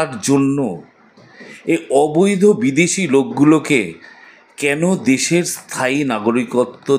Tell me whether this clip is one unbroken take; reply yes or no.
yes